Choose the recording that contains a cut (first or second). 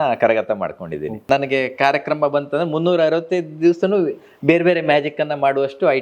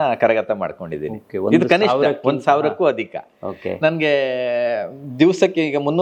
first